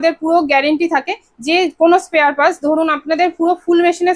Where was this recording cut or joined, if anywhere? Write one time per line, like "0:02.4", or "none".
none